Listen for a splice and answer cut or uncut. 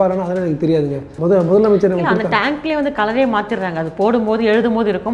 cut